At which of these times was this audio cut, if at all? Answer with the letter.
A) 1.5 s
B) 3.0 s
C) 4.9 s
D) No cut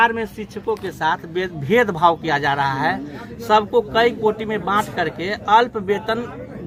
D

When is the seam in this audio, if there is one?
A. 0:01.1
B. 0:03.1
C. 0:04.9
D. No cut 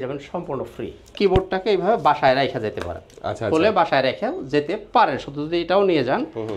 A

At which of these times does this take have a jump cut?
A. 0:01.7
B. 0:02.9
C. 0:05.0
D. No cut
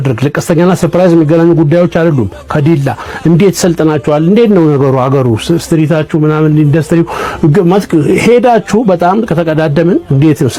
D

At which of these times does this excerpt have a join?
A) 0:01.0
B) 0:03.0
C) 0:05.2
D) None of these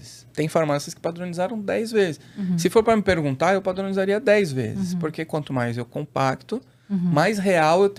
D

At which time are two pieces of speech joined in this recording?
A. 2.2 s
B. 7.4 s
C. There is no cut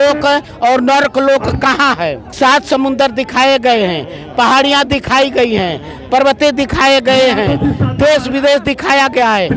A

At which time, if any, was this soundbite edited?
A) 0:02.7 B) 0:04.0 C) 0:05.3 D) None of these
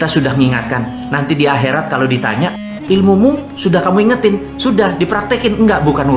A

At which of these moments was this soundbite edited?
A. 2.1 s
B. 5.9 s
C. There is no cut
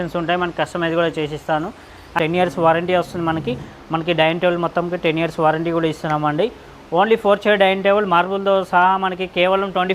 A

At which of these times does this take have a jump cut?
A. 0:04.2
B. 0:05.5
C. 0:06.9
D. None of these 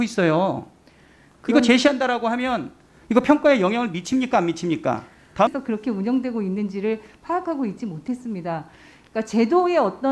B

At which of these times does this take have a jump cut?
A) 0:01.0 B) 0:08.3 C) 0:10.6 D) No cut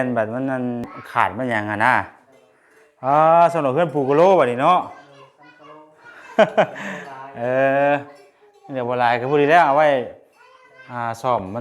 A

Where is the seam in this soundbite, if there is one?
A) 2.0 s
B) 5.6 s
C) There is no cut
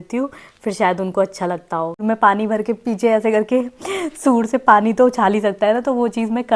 A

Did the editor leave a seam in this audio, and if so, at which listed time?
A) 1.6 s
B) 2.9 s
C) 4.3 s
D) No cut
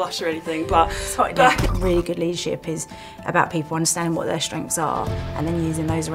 A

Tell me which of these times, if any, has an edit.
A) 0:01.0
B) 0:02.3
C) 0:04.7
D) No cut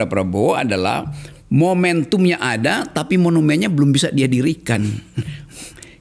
D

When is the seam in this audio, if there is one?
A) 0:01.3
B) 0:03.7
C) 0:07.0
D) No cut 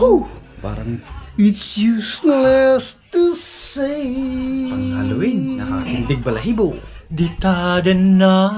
C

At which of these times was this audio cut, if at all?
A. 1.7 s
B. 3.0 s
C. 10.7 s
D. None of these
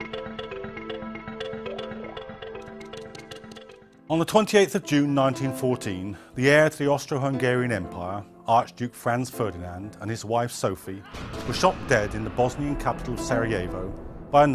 B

